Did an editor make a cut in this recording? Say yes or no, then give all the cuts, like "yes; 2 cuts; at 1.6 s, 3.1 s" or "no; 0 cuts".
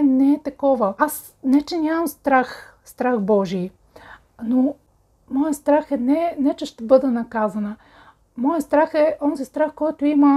yes; 2 cuts; at 0.9 s, 4.9 s